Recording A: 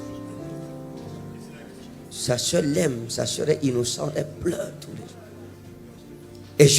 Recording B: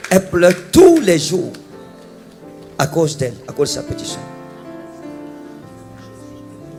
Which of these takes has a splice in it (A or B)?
A